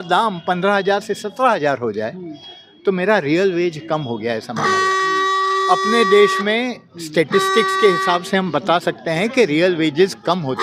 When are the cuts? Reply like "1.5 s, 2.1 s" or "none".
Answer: none